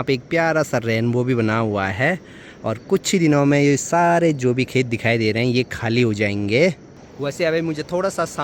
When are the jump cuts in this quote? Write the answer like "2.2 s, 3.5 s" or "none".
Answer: none